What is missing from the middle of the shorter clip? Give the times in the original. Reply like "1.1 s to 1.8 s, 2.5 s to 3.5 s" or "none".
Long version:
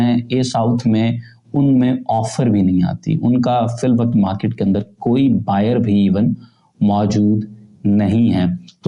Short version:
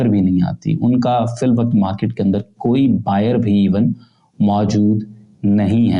none